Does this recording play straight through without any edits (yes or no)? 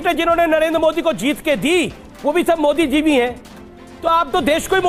yes